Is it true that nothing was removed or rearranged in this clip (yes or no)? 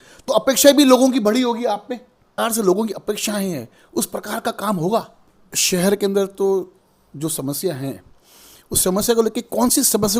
no